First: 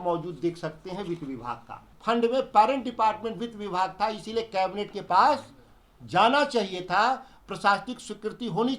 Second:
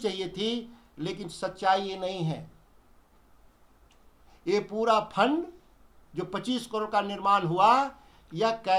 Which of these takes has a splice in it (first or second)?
first